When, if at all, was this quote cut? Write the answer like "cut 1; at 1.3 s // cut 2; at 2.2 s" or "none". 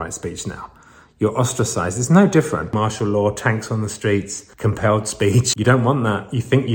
cut 1; at 2.7 s // cut 2; at 4.4 s // cut 3; at 5.5 s